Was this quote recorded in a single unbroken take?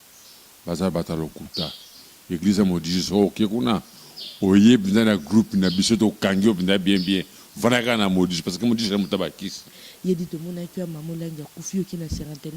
no; 1 cut; at 9.9 s

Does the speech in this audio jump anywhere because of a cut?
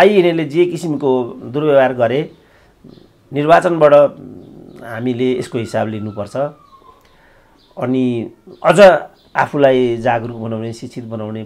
no; 0 cuts

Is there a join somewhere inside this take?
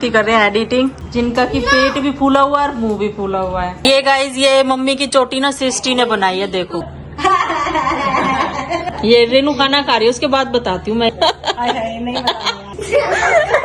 yes; 5 cuts; at 3.8 s, 7.0 s, 8.9 s, 11.1 s, 12.7 s

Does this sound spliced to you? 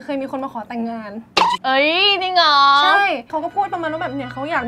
yes; 1 cut; at 3.3 s

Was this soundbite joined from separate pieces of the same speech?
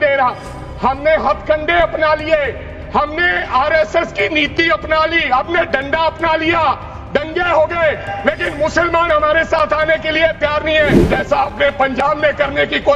yes; 1 cut; at 11.0 s

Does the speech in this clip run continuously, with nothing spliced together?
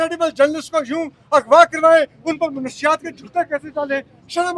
yes; 0 cuts

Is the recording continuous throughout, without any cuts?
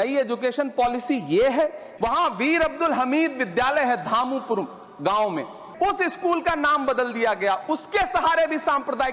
no; 2 cuts; at 1.8 s, 5.6 s

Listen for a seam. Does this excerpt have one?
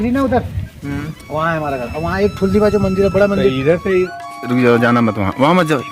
yes; 1 cut; at 4.2 s

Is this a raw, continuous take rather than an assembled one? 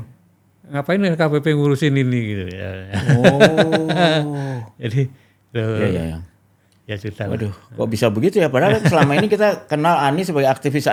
yes; 0 cuts

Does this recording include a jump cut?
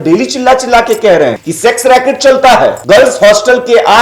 yes; 2 cuts; at 1.4 s, 2.8 s

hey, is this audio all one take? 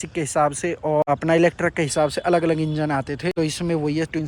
no; 2 cuts; at 1.0 s, 3.3 s

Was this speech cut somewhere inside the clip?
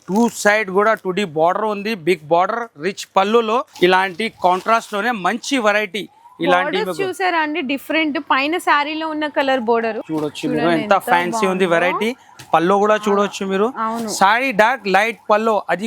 yes; 2 cuts; at 3.7 s, 10.0 s

